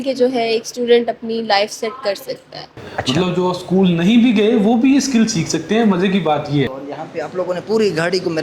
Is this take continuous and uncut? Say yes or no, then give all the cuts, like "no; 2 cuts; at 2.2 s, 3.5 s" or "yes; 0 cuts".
no; 2 cuts; at 2.7 s, 6.8 s